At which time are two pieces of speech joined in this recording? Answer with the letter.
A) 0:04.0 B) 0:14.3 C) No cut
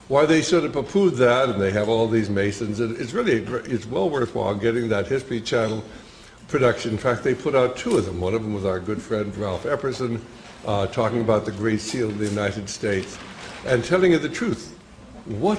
B